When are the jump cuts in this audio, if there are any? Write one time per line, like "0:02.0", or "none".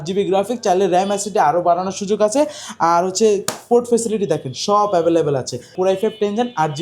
0:05.7